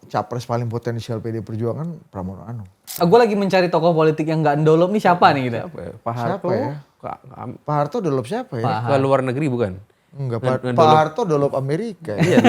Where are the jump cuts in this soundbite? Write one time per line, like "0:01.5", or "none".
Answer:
0:03.0